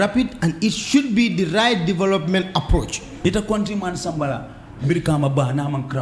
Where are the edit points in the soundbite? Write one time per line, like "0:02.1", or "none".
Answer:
0:03.2